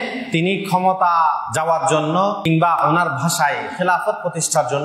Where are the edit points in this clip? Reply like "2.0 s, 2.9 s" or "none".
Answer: 1.5 s, 2.8 s